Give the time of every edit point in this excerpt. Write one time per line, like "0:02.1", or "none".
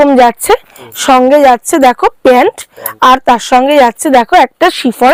none